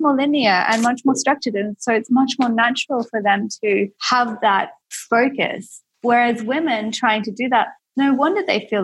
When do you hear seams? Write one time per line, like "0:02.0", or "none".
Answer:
0:04.4